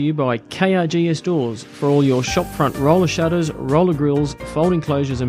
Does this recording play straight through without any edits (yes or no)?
yes